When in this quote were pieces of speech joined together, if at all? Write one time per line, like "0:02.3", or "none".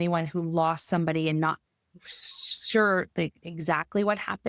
none